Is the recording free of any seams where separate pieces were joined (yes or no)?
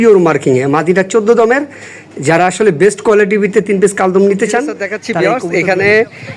no